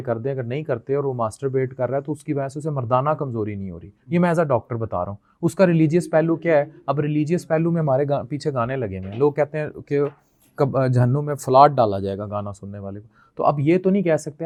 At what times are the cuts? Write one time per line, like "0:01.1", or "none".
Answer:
none